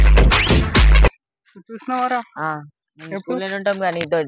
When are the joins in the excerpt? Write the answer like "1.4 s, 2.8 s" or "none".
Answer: 1.1 s